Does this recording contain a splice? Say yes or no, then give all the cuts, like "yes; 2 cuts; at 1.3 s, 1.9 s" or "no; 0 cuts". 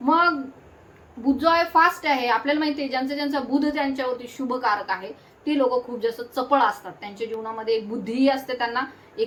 no; 0 cuts